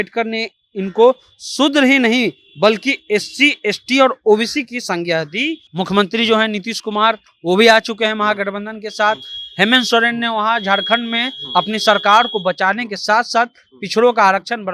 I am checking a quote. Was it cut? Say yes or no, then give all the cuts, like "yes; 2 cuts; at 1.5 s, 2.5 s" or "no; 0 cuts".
yes; 1 cut; at 5.6 s